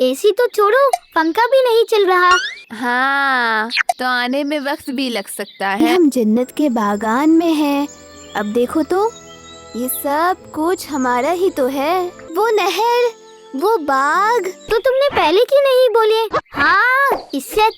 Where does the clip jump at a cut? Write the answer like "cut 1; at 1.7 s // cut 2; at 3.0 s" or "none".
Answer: cut 1; at 2.7 s // cut 2; at 4.0 s // cut 3; at 5.8 s // cut 4; at 12.2 s // cut 5; at 14.6 s